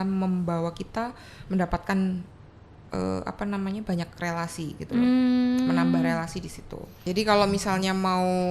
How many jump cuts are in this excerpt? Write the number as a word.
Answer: one